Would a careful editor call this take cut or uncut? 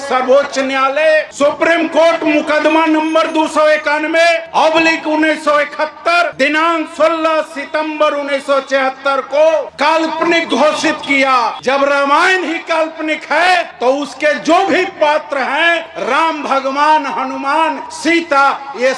cut